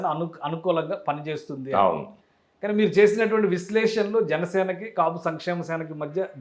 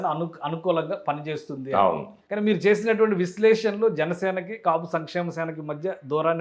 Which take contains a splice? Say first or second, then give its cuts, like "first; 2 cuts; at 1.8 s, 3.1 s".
second; 1 cut; at 2.2 s